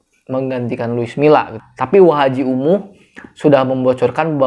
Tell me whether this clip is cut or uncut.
cut